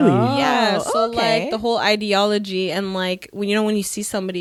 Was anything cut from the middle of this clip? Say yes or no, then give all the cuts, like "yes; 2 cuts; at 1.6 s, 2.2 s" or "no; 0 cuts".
no; 0 cuts